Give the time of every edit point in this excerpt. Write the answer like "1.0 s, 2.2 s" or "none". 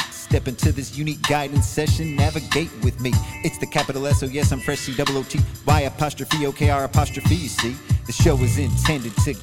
none